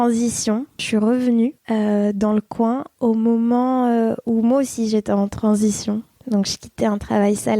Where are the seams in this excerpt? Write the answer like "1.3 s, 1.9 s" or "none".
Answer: 0.8 s, 1.6 s, 6.1 s